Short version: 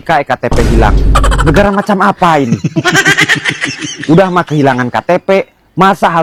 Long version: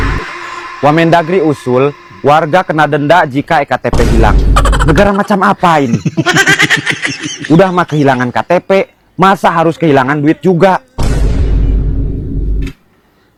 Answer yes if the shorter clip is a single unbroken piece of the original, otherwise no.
yes